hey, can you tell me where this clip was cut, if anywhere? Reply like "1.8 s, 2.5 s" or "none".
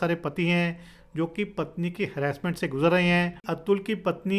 3.5 s